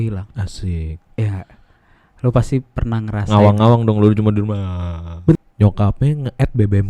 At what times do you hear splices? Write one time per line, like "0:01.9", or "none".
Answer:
0:05.4